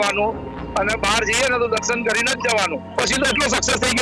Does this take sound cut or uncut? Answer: cut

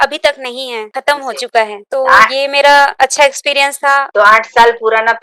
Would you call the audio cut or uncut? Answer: cut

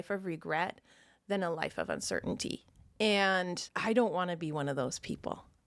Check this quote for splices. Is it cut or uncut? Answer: uncut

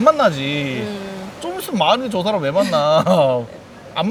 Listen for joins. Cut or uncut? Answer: uncut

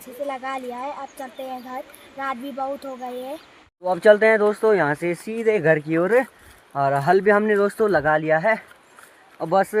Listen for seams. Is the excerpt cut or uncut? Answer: uncut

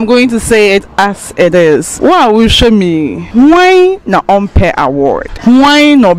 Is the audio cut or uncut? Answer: cut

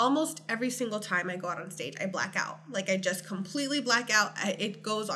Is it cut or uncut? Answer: uncut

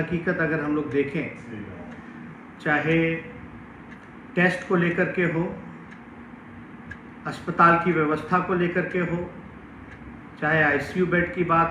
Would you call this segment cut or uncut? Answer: uncut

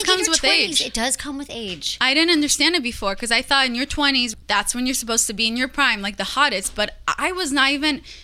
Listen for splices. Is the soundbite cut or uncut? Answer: cut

